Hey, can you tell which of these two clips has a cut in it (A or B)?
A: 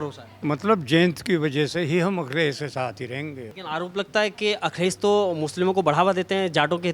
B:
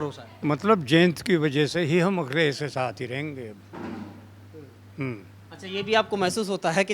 A